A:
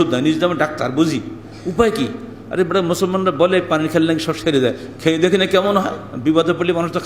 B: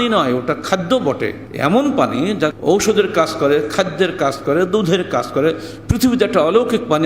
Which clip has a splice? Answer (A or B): B